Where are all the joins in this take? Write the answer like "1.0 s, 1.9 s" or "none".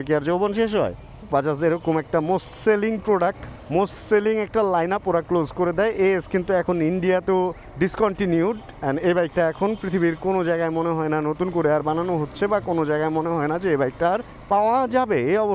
1.3 s